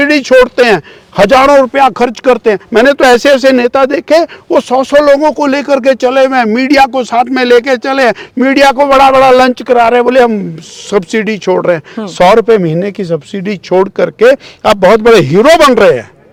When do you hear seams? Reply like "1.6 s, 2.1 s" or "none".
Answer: none